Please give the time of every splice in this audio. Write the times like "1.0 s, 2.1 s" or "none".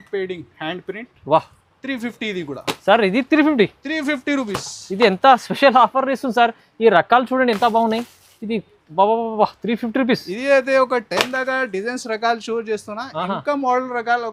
none